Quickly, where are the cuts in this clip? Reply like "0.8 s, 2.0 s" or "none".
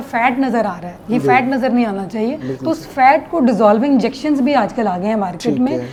none